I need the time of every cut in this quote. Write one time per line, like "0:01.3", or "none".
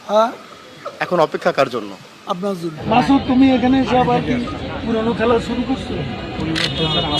0:02.7